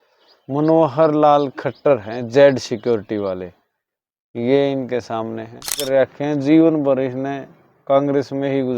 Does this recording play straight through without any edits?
no; 1 cut; at 5.9 s

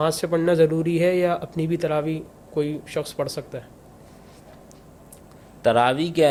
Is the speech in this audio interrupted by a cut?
no; 0 cuts

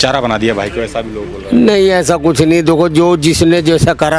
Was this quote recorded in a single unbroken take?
yes; 0 cuts

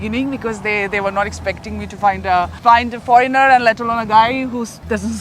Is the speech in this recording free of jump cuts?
no; 1 cut; at 2.5 s

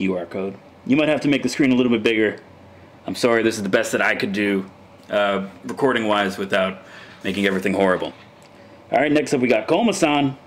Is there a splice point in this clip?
yes; 1 cut; at 9.2 s

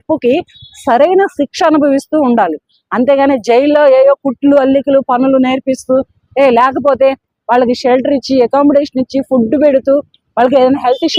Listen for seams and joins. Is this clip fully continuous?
yes; 0 cuts

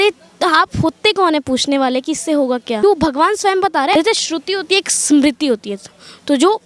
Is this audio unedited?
no; 2 cuts; at 2.8 s, 3.9 s

